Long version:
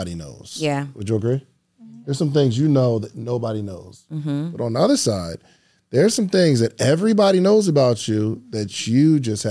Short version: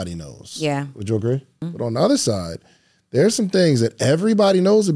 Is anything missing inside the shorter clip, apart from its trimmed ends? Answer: yes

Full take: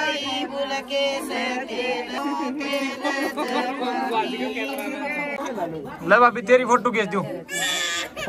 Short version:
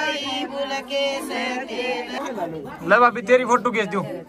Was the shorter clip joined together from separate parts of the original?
yes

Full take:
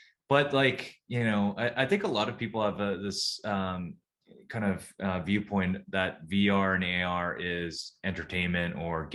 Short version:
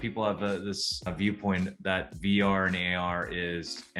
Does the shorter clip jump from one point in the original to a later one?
yes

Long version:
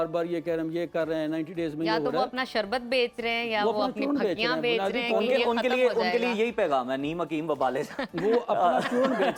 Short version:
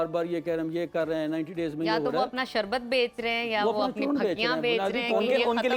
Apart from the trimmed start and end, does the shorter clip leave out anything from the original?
no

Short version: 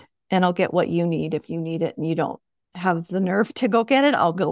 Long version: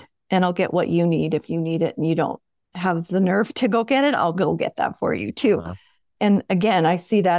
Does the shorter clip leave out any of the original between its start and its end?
no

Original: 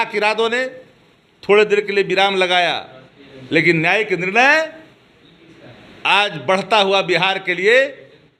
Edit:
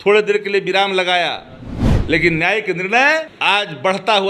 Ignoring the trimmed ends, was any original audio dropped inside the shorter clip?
yes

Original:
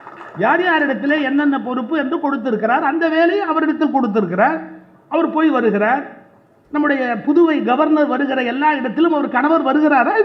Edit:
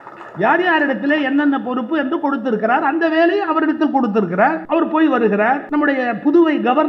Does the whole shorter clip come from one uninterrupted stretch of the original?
no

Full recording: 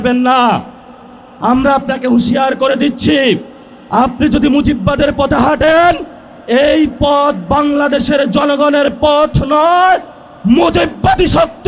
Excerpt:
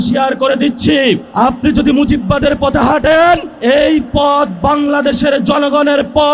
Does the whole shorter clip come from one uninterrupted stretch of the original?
no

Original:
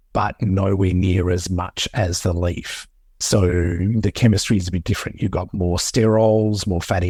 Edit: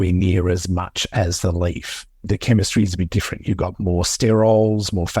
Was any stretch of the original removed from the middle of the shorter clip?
yes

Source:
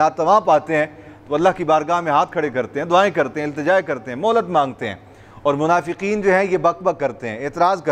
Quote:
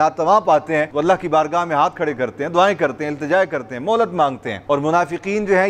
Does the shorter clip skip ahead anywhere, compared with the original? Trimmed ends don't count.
yes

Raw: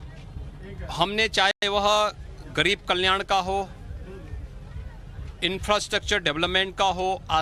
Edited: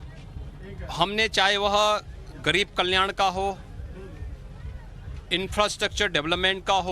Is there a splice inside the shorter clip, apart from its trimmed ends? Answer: yes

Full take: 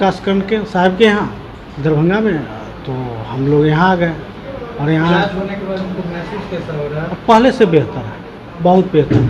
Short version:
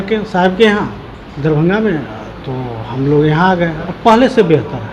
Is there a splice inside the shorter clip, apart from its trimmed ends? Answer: yes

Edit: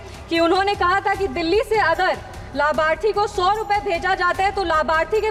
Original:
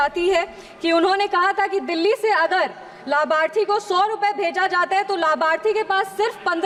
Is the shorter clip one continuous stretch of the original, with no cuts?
yes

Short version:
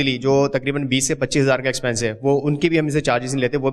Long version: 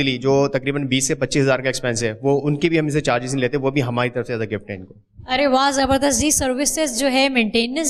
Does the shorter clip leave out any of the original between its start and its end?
no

